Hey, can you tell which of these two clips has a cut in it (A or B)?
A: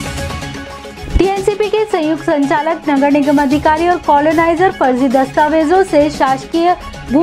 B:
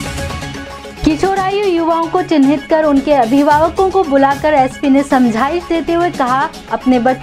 A